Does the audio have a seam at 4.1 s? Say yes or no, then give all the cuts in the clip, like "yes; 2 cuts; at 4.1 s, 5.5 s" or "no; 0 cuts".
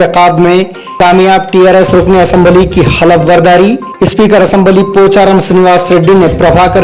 no; 0 cuts